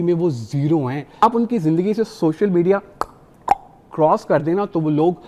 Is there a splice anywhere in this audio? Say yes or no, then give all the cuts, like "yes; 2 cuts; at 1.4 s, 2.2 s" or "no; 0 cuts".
yes; 1 cut; at 1.2 s